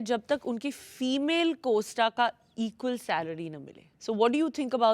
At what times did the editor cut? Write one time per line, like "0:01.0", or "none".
none